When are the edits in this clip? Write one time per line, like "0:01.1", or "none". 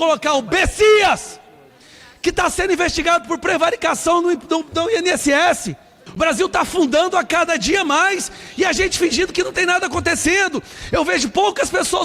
0:06.0